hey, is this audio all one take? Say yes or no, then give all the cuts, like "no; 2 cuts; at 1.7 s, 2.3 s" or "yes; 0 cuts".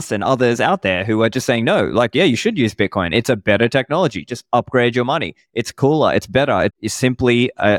no; 1 cut; at 6.8 s